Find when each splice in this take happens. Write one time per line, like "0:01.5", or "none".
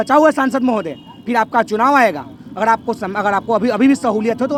none